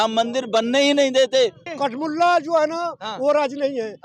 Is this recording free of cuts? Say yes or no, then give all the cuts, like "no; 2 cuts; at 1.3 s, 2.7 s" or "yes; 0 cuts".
no; 1 cut; at 1.6 s